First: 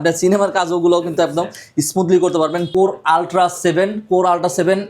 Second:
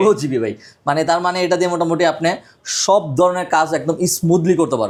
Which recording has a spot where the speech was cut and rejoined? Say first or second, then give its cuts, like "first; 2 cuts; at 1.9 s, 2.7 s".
first; 1 cut; at 2.7 s